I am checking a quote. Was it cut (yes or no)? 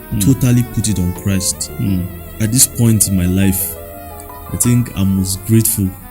yes